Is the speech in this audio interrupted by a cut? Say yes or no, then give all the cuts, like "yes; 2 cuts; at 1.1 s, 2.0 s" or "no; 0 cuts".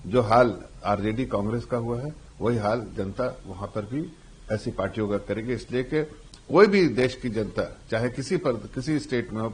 no; 0 cuts